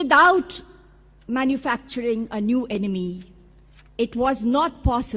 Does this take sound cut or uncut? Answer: cut